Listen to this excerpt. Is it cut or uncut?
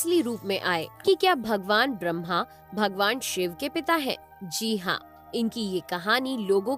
cut